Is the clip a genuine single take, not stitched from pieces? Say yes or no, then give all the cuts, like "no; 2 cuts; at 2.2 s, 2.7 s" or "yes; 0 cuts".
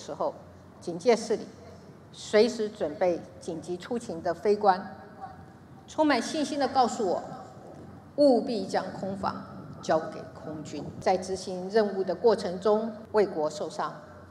no; 2 cuts; at 11.0 s, 13.0 s